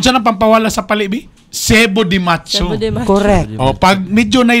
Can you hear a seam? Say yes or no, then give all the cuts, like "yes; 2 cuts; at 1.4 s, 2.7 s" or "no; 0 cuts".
no; 0 cuts